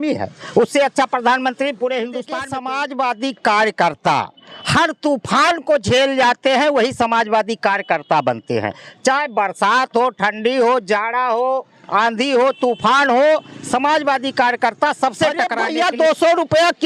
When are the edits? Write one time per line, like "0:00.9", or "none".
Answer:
0:02.4
0:15.6